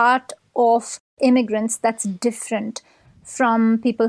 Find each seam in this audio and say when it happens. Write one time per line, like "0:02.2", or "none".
0:01.0